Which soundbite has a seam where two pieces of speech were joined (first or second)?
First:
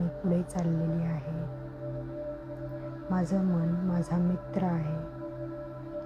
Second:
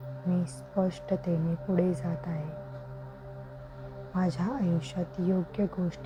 first